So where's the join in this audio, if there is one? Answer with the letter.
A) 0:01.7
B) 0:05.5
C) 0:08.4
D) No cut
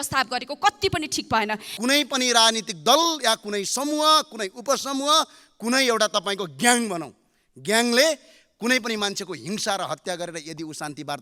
A